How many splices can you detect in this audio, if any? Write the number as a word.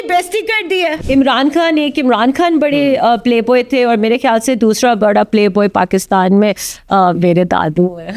one